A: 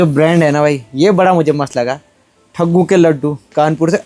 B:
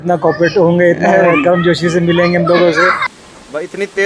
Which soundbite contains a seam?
B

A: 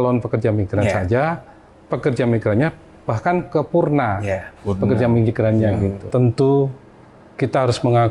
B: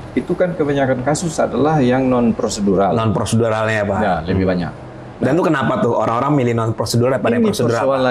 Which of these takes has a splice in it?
A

